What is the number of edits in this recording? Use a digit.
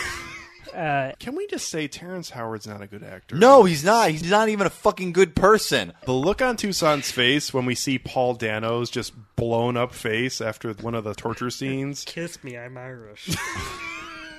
4